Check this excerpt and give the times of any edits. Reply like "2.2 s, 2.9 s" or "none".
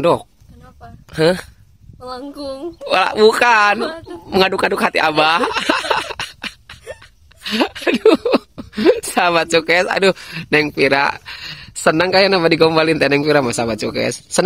none

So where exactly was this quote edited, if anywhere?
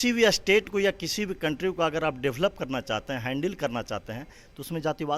none

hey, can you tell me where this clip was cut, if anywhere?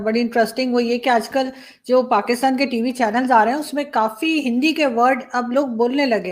none

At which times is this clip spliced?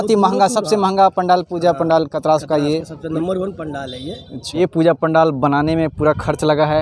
4.6 s

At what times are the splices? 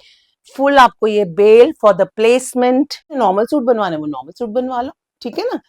3.2 s

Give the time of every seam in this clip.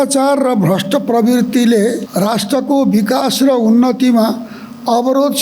2.0 s

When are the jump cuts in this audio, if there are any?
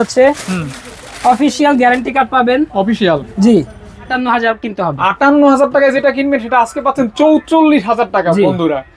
4.1 s

